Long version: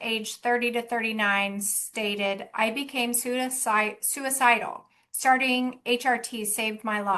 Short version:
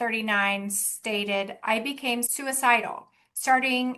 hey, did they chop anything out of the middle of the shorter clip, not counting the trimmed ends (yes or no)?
yes